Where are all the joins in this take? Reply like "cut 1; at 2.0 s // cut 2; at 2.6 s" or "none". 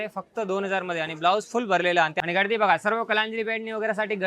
cut 1; at 2.1 s